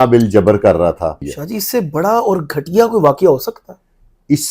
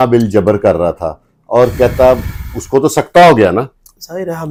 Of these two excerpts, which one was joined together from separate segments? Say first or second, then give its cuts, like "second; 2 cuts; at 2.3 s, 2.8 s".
first; 1 cut; at 1.3 s